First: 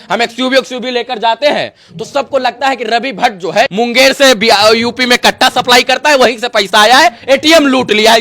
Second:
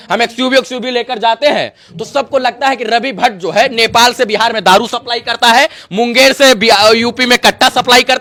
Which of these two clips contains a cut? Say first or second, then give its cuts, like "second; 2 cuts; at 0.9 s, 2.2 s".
first; 1 cut; at 3.7 s